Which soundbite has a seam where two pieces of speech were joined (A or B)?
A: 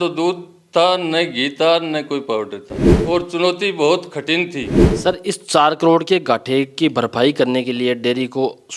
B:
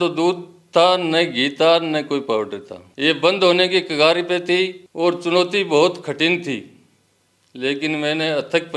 A